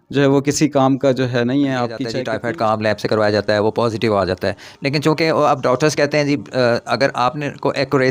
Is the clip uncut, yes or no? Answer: no